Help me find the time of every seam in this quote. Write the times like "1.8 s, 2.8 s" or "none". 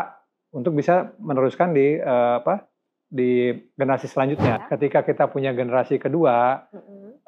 4.6 s